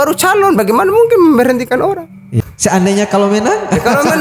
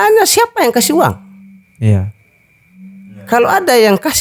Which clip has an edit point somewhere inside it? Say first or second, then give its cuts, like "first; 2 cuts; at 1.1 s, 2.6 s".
first; 1 cut; at 2.3 s